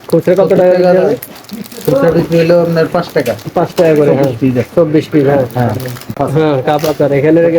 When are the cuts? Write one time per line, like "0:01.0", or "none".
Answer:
0:06.2